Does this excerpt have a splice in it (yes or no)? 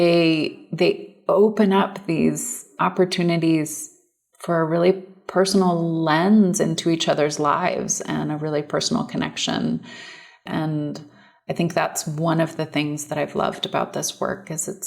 yes